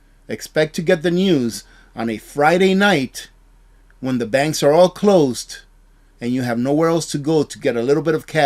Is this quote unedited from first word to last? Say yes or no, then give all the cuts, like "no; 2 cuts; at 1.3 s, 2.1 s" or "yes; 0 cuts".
yes; 0 cuts